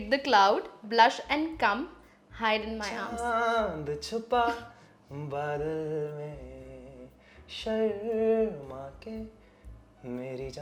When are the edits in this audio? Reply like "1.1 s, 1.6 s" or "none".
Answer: none